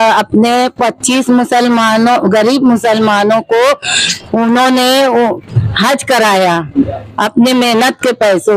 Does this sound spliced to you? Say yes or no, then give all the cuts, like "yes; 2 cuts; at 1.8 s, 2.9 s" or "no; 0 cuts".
no; 0 cuts